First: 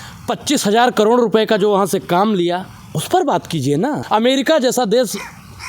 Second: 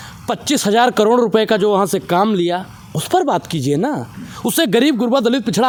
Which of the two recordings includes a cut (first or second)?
first